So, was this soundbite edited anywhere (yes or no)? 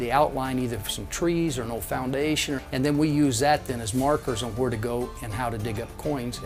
yes